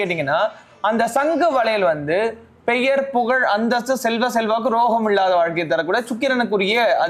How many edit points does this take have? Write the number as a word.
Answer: zero